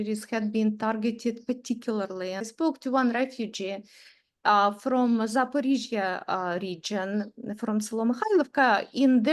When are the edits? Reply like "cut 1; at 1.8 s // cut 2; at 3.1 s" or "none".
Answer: cut 1; at 2.4 s